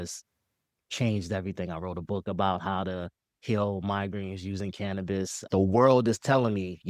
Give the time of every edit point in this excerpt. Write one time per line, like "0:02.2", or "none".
0:05.5